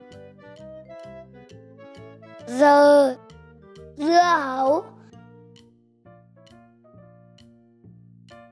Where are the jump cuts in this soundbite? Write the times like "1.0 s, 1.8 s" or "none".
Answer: 2.5 s, 5.3 s